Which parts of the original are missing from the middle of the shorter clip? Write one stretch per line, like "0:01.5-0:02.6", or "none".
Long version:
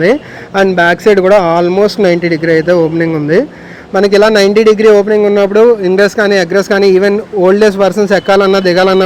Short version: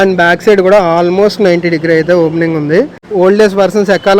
0:03.6-0:07.3

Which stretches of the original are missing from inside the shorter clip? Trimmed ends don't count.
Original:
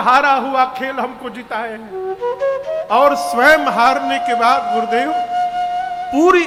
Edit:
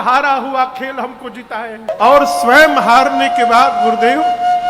0:01.9-0:02.8

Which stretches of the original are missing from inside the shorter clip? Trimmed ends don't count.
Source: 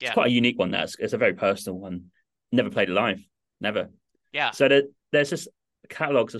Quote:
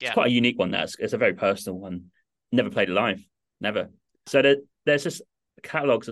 0:04.3-0:04.5

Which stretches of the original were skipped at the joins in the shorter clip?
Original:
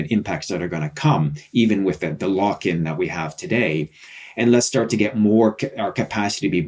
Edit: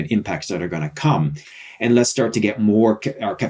0:01.4-0:04.0

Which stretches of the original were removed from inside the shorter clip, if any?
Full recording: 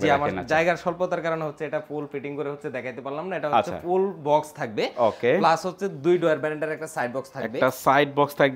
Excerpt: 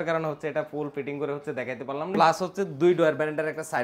0:03.3-0:05.4

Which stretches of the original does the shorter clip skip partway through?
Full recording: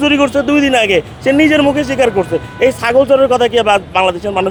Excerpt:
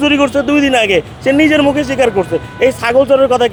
none

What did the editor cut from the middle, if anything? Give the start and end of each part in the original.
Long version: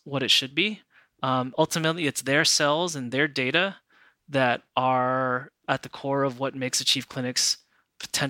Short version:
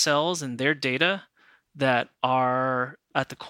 none

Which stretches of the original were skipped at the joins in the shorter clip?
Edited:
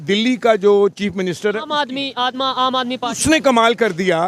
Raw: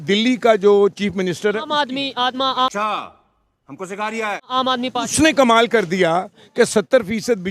0:02.6-0:04.5

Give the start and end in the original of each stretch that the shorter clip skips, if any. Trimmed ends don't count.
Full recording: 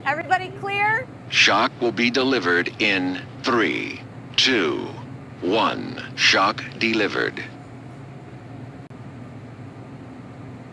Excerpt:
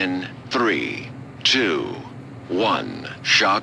none

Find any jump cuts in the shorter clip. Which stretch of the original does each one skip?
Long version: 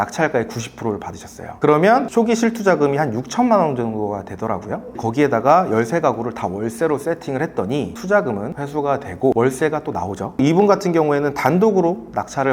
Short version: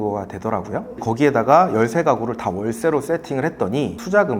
none

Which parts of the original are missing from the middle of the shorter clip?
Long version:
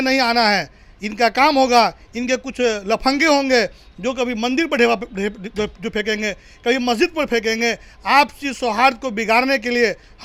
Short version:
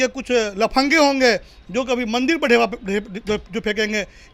none

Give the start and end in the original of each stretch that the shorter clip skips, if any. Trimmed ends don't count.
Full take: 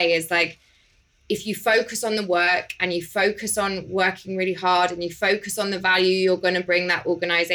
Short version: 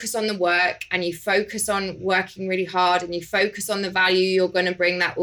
none

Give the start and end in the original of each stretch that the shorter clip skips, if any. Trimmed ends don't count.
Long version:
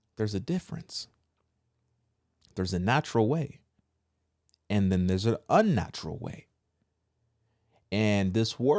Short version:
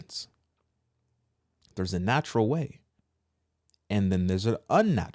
none

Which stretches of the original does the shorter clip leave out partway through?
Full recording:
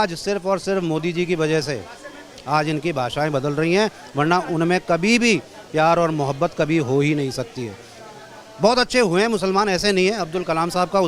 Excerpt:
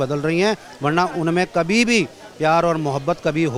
none

